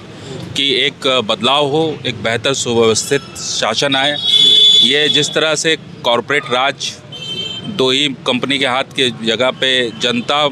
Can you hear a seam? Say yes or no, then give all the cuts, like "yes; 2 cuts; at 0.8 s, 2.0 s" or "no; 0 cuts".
no; 0 cuts